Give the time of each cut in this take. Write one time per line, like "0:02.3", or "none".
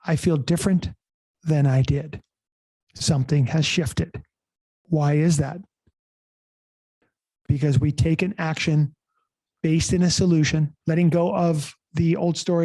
0:10.8